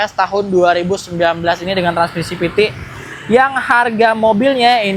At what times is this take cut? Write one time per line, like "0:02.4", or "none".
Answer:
none